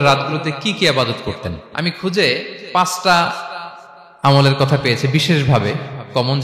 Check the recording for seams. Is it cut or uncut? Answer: uncut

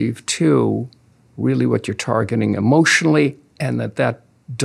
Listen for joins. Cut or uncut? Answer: uncut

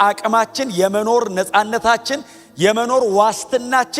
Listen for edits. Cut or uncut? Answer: uncut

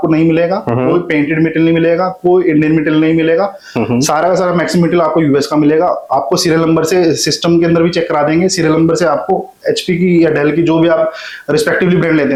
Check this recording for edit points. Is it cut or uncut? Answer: uncut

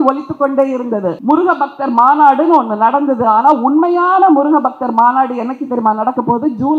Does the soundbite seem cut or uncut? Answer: cut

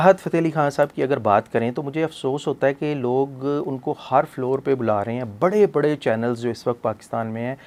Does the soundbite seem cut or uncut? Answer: uncut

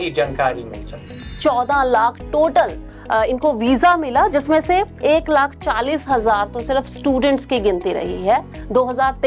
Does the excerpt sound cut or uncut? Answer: cut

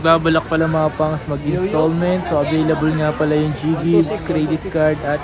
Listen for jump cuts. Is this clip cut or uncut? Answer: uncut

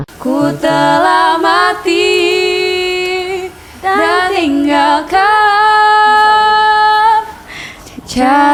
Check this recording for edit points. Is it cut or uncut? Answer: uncut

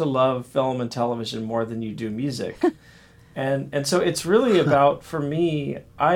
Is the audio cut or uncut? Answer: uncut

